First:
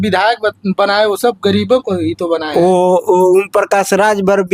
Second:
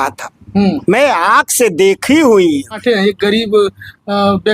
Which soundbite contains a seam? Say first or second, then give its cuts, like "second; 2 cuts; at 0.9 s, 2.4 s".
second; 1 cut; at 2.8 s